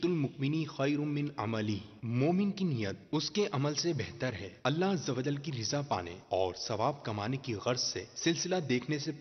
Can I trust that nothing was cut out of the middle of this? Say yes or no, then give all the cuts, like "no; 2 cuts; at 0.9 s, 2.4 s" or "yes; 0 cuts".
no; 1 cut; at 7.4 s